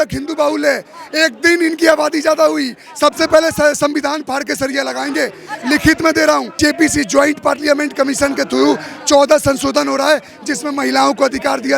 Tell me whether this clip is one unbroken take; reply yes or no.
no